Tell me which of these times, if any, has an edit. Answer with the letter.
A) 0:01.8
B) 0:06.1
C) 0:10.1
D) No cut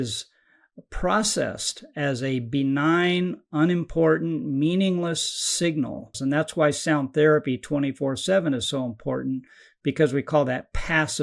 B